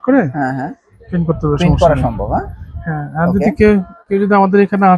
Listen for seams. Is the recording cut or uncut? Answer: uncut